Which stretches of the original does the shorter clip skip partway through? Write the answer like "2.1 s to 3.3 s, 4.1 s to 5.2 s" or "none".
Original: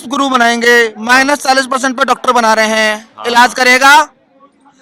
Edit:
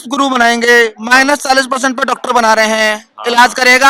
none